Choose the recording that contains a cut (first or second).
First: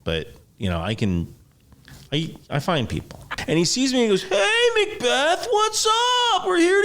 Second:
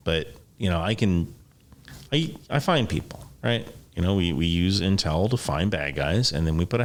first